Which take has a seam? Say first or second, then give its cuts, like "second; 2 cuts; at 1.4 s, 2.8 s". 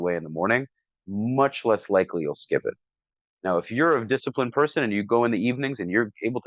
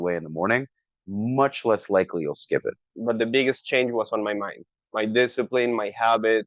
second; 1 cut; at 2.9 s